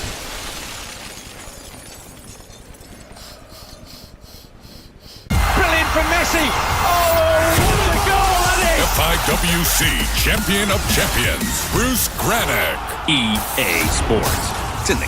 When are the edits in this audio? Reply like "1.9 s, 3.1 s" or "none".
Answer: 11.4 s